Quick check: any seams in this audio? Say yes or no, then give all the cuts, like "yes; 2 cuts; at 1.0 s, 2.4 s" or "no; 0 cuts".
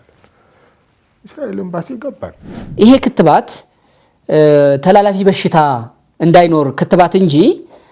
yes; 1 cut; at 2.6 s